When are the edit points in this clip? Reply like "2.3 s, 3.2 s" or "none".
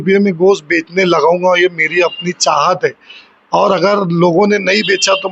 none